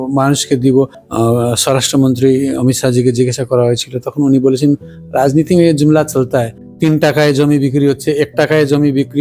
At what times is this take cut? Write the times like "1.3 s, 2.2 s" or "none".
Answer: 1.0 s, 6.6 s